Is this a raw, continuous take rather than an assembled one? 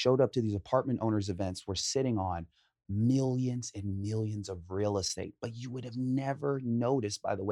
yes; 0 cuts

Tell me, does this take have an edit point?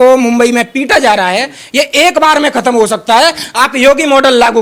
no; 0 cuts

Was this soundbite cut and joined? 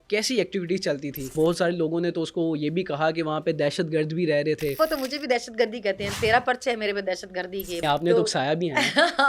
yes; 3 cuts; at 1.3 s, 4.7 s, 7.8 s

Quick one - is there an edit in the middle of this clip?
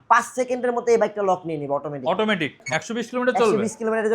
yes; 1 cut; at 2.7 s

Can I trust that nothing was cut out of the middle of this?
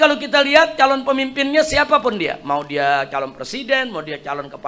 yes; 0 cuts

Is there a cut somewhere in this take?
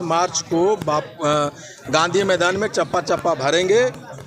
no; 0 cuts

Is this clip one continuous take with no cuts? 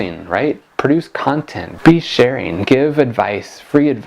no; 1 cut; at 1.7 s

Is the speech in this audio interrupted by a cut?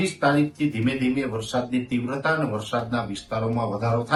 no; 0 cuts

